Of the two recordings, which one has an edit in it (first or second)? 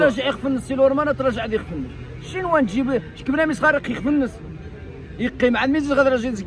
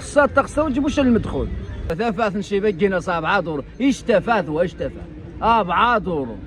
second